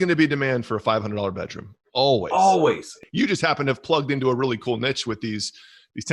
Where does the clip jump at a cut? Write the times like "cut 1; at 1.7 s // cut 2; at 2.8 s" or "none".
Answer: cut 1; at 2.9 s